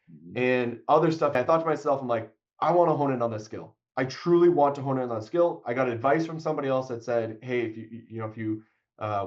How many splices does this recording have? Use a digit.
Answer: 1